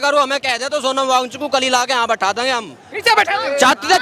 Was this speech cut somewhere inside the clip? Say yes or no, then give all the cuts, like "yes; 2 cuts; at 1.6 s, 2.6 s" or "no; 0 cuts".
no; 0 cuts